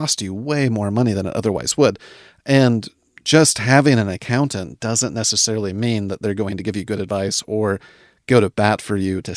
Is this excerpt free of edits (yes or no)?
yes